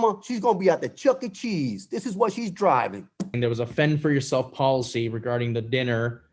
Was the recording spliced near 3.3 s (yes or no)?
yes